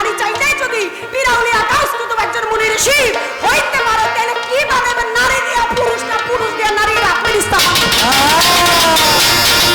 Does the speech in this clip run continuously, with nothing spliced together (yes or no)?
yes